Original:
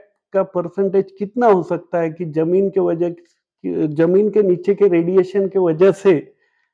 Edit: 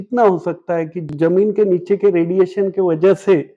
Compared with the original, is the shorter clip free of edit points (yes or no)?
no